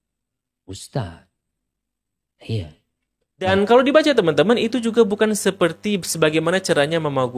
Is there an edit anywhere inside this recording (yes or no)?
yes